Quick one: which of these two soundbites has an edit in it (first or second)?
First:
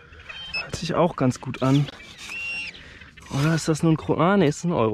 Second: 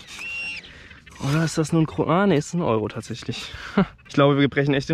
second